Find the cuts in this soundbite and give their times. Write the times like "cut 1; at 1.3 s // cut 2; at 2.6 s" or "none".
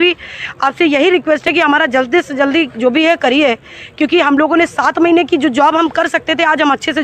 none